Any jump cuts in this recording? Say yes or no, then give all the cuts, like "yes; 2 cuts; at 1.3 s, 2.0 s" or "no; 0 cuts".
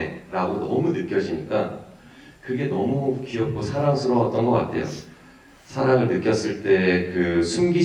no; 0 cuts